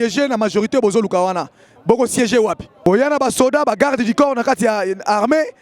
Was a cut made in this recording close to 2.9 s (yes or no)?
yes